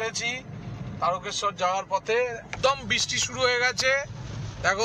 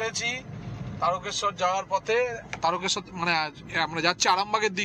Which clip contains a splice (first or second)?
first